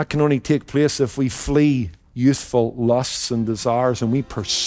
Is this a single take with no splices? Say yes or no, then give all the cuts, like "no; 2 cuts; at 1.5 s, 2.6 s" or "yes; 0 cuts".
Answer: yes; 0 cuts